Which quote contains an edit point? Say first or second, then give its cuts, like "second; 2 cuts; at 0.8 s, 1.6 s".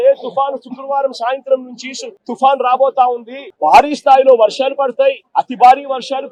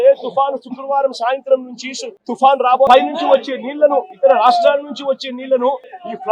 second; 1 cut; at 2.9 s